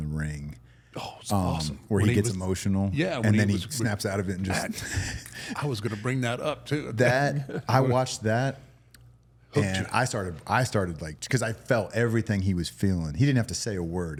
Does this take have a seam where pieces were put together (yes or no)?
no